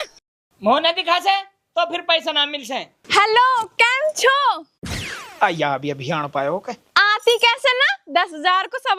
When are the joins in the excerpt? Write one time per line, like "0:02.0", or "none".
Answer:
0:02.9